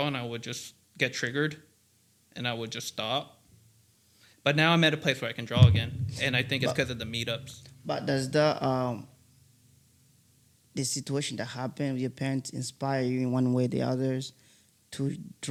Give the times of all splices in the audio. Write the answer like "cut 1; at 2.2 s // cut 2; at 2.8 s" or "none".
none